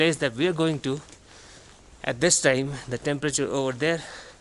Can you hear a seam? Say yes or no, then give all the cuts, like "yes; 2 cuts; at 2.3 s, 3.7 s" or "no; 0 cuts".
no; 0 cuts